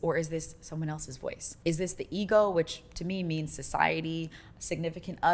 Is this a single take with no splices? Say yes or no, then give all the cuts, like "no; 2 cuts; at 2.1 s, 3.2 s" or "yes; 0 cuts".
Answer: no; 1 cut; at 1.5 s